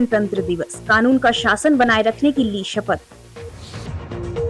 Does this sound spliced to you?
yes; 1 cut; at 3.2 s

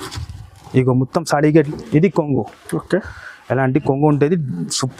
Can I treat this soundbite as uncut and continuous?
no; 1 cut; at 1.7 s

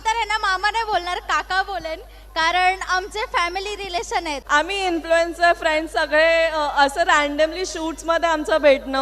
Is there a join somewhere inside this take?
yes; 1 cut; at 4.4 s

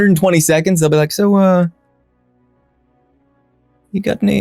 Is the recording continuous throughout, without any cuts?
yes; 0 cuts

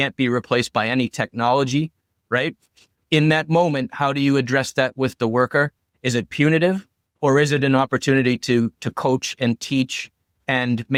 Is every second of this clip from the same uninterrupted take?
yes; 0 cuts

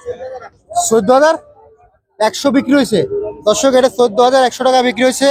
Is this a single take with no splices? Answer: yes; 0 cuts

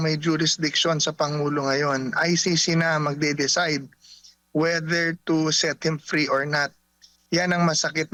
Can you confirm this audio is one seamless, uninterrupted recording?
yes; 0 cuts

